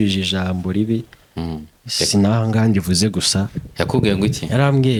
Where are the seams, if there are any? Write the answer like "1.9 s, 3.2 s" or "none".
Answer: none